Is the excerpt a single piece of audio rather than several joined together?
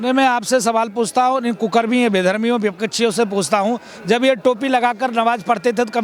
yes; 0 cuts

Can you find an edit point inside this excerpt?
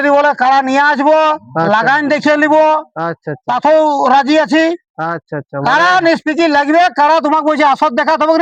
no; 0 cuts

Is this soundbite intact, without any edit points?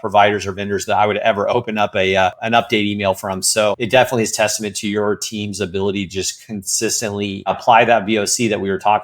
no; 3 cuts; at 2.4 s, 3.8 s, 7.6 s

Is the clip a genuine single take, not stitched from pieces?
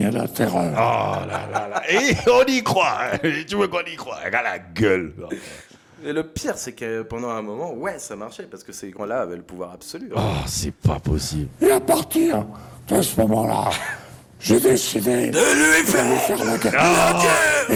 yes; 0 cuts

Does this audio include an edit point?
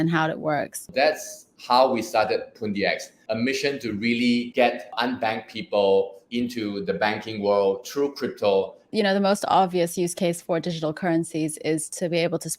yes; 5 cuts; at 1.0 s, 3.1 s, 4.9 s, 6.2 s, 8.9 s

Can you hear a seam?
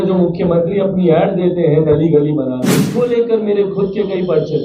yes; 1 cut; at 2.8 s

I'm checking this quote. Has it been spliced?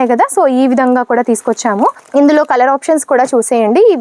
yes; 1 cut; at 2.0 s

